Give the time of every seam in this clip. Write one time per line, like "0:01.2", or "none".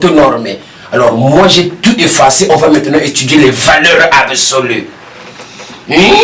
none